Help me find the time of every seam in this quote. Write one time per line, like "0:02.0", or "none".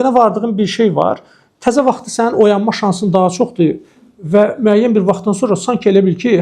none